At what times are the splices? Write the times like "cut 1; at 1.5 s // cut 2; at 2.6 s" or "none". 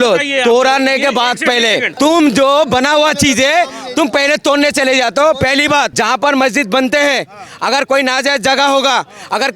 cut 1; at 1.9 s // cut 2; at 5.9 s